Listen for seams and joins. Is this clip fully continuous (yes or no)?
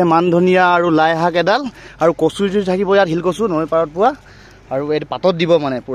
yes